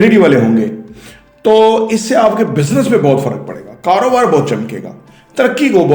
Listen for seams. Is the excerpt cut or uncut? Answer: uncut